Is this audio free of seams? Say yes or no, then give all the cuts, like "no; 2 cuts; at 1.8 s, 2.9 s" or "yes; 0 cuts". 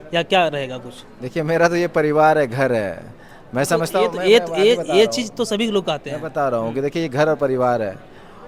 yes; 0 cuts